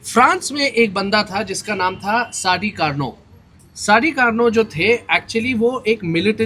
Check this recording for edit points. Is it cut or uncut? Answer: uncut